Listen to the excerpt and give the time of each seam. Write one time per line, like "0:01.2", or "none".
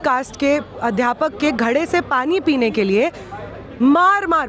none